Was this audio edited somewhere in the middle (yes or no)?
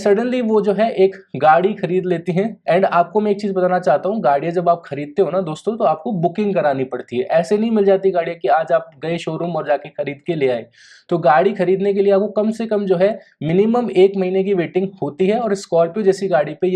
yes